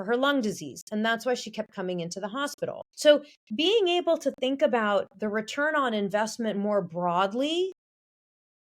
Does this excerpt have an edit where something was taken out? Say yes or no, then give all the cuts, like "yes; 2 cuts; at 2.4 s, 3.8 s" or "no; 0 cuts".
yes; 1 cut; at 2.9 s